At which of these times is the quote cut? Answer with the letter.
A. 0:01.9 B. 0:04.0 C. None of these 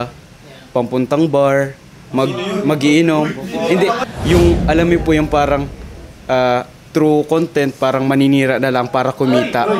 B